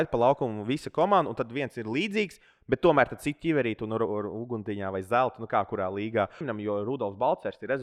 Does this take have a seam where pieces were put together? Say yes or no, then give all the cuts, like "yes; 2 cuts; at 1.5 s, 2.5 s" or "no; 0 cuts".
yes; 1 cut; at 6.5 s